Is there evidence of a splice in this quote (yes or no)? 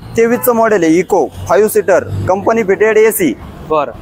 no